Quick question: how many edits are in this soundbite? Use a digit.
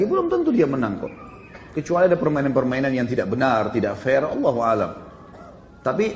1